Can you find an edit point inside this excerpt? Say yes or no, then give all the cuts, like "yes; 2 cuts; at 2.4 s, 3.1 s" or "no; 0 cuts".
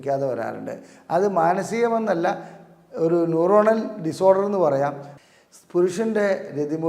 yes; 1 cut; at 5.1 s